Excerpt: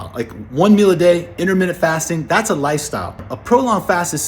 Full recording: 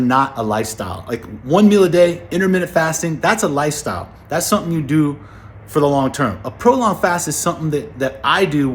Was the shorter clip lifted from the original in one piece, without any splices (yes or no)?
no